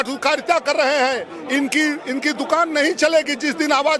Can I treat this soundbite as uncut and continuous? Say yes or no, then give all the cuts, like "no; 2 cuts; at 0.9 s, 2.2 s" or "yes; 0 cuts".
yes; 0 cuts